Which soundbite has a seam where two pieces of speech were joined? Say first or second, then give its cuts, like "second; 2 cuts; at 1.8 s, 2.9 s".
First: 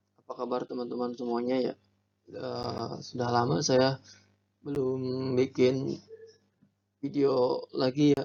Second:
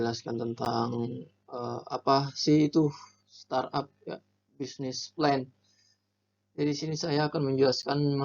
second; 1 cut; at 6.6 s